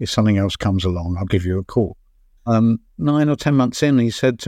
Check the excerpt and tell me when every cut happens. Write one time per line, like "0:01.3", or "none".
0:02.3